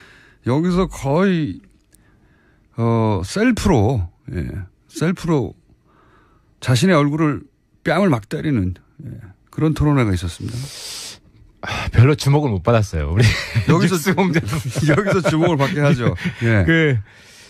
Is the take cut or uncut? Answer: uncut